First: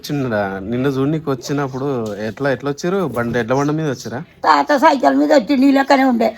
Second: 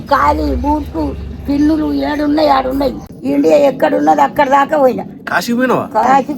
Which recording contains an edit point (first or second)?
second